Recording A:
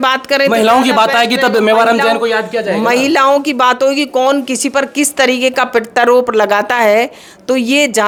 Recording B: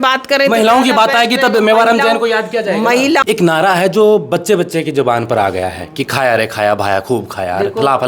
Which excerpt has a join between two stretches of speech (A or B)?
B